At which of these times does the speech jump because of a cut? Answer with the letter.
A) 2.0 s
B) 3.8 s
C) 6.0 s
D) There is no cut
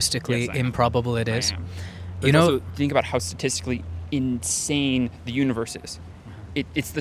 D